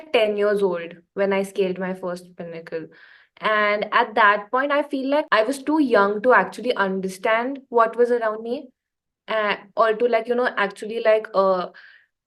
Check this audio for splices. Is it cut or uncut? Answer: cut